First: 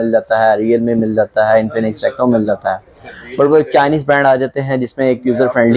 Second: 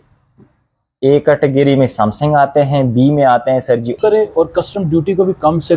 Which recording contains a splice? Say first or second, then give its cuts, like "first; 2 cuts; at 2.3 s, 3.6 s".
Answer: second; 1 cut; at 4.0 s